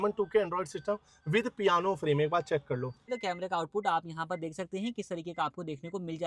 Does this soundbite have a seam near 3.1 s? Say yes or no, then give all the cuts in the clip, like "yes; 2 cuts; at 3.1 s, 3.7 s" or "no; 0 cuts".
yes; 1 cut; at 3.1 s